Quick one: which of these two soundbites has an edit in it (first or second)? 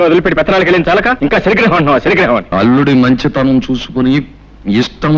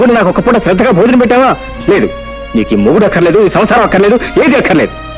first